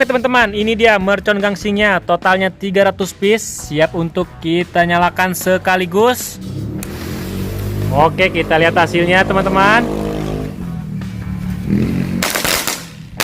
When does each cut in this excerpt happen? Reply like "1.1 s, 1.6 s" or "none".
6.5 s, 7.9 s